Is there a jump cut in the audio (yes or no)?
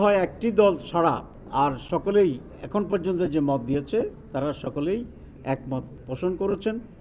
yes